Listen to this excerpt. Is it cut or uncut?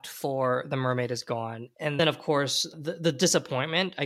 uncut